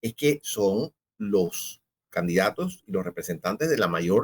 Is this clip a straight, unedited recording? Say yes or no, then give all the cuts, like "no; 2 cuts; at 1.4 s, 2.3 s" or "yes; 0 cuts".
no; 1 cut; at 1.1 s